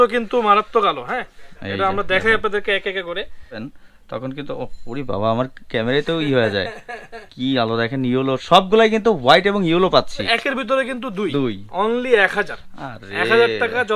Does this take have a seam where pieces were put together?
yes; 2 cuts; at 3.7 s, 10.3 s

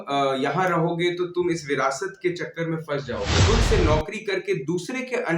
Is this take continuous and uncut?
no; 1 cut; at 3.4 s

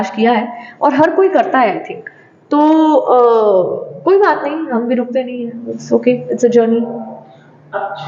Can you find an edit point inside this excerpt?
no; 0 cuts

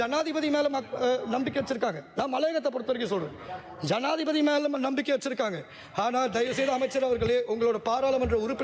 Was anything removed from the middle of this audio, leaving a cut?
no; 0 cuts

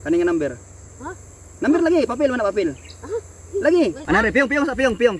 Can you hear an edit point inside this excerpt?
yes; 1 cut; at 4.0 s

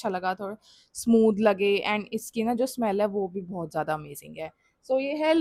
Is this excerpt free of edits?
yes; 0 cuts

